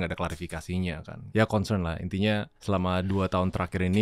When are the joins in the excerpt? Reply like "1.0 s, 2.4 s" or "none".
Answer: 1.1 s, 2.5 s